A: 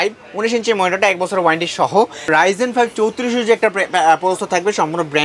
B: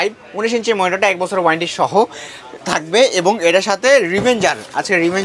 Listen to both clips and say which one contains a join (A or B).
A